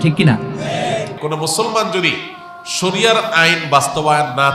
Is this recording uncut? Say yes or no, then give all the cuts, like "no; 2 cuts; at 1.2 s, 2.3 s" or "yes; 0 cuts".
no; 1 cut; at 1.1 s